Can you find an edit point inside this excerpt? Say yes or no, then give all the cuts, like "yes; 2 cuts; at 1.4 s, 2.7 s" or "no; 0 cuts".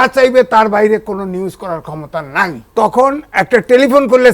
yes; 1 cut; at 2.6 s